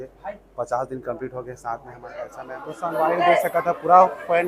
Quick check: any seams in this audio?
yes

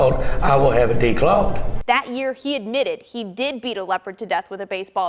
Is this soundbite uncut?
no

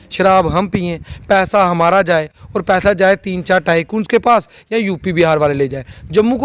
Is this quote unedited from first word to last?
yes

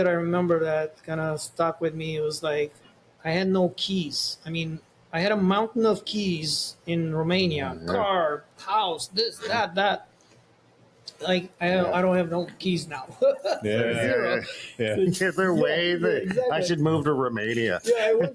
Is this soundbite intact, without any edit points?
yes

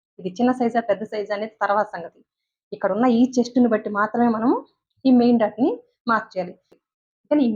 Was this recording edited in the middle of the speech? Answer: yes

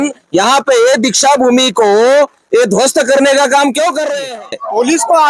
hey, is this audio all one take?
no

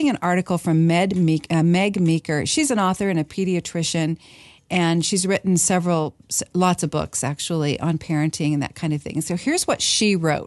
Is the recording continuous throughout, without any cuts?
yes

